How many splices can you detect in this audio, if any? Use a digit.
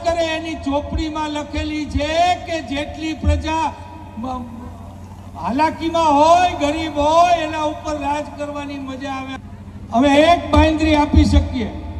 1